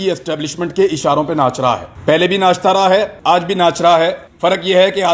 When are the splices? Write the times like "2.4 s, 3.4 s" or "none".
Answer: 1.9 s, 3.1 s, 4.2 s